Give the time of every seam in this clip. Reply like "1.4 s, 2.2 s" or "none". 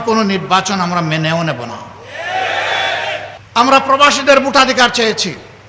3.4 s